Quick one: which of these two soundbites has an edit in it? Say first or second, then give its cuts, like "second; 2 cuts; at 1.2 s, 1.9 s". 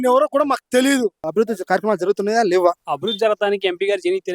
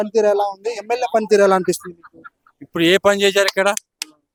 first; 2 cuts; at 1.3 s, 2.9 s